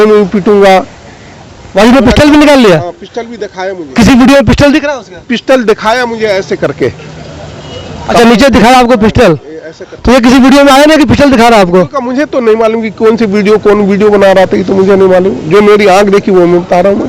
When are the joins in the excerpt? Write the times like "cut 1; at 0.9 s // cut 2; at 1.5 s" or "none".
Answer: none